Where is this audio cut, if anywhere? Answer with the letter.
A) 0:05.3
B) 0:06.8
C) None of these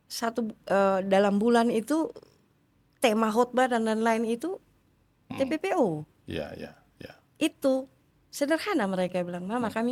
C